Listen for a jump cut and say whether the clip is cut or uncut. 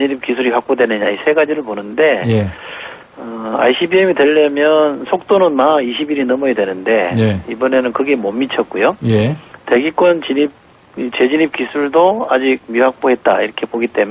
uncut